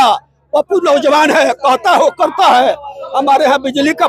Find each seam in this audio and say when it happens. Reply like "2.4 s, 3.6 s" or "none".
none